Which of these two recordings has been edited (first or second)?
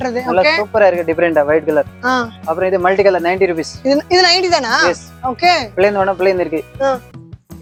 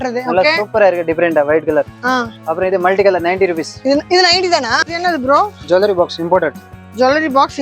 second